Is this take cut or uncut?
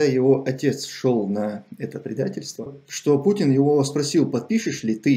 cut